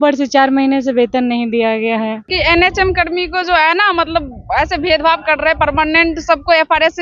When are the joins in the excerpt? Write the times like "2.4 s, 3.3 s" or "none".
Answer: 2.2 s

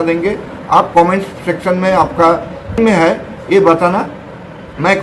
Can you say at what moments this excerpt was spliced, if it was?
none

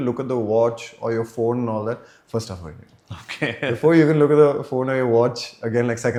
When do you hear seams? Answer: none

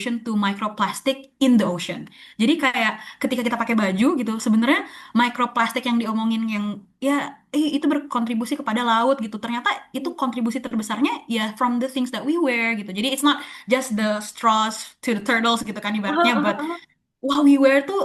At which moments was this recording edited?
none

